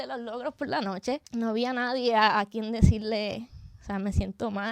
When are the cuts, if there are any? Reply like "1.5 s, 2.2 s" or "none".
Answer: 1.2 s